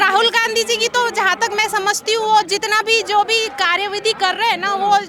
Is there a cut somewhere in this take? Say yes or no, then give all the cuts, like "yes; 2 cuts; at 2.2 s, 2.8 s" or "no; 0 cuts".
no; 0 cuts